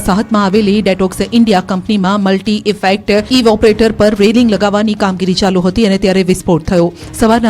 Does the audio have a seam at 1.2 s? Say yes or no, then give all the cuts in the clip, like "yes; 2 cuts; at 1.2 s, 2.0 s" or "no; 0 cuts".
yes; 1 cut; at 1.2 s